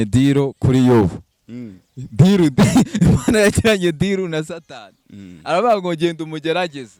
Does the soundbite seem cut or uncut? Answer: uncut